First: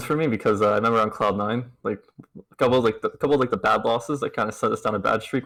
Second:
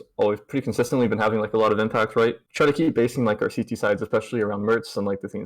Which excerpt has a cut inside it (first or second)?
second